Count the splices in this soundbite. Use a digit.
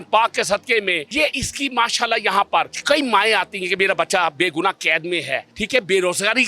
3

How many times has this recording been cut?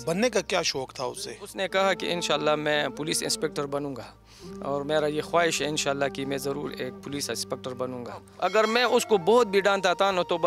2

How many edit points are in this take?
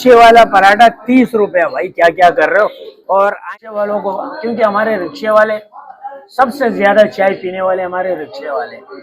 1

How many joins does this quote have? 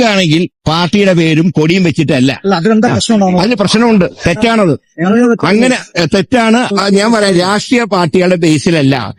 0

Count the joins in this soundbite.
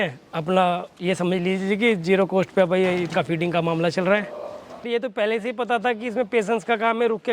1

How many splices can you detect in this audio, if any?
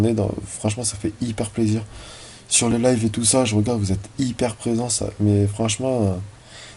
0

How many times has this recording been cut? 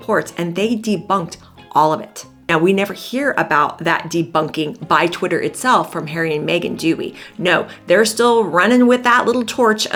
0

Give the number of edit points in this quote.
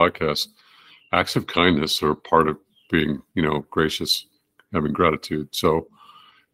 0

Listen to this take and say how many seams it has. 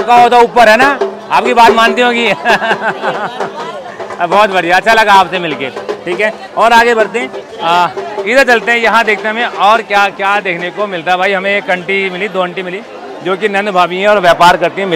0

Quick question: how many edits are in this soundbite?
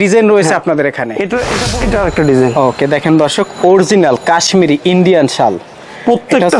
1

